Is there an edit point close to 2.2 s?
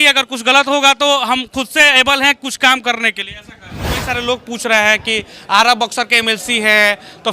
no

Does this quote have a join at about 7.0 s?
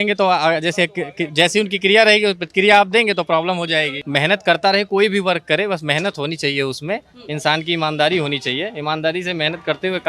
no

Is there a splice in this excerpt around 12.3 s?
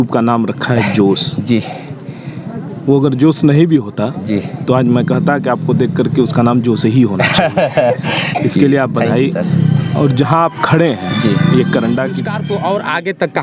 yes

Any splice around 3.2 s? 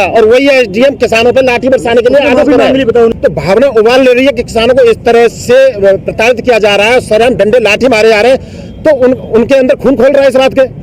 yes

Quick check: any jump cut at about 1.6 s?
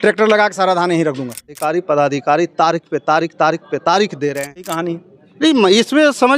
yes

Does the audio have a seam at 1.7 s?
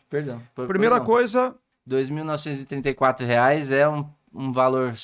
yes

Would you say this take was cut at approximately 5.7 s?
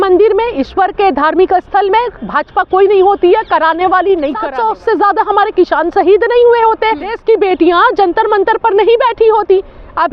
no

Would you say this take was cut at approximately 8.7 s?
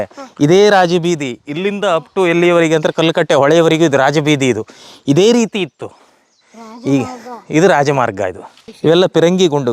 yes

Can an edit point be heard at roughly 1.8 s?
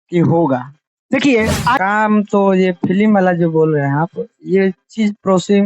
yes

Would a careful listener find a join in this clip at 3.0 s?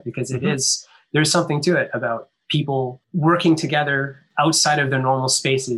yes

